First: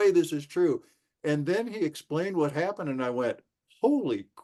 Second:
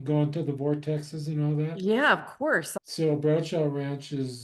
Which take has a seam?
second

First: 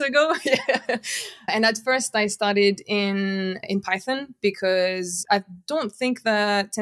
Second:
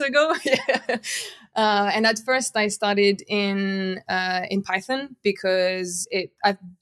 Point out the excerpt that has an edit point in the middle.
first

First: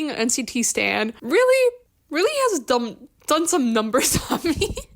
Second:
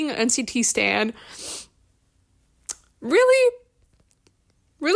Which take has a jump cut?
first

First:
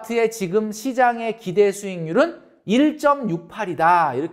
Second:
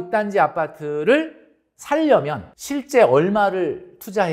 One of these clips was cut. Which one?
second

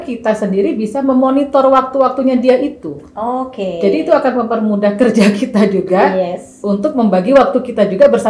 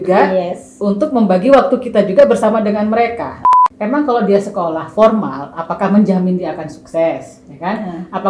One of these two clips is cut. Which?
second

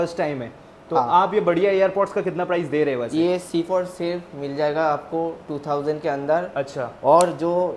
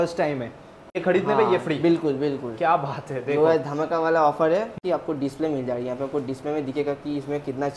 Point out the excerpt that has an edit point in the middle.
second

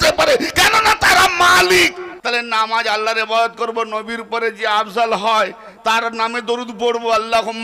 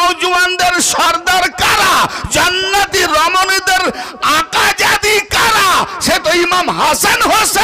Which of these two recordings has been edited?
first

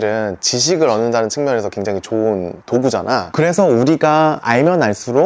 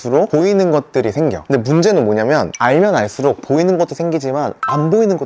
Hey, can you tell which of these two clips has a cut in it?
first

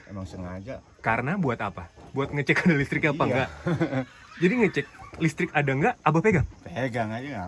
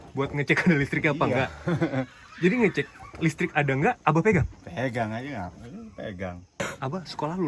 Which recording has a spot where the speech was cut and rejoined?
second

